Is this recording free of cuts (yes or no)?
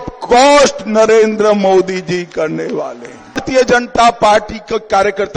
no